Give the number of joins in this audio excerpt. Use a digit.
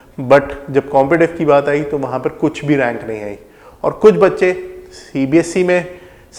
0